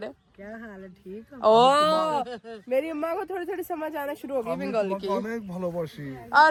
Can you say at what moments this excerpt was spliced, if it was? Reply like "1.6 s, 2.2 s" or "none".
none